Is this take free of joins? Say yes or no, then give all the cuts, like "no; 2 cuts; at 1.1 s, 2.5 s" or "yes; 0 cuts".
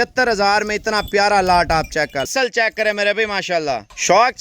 no; 1 cut; at 2.3 s